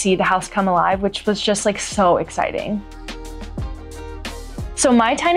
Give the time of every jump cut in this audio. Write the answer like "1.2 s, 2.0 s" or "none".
none